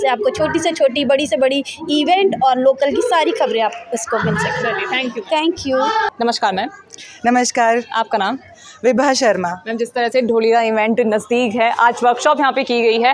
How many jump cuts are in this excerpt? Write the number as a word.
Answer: zero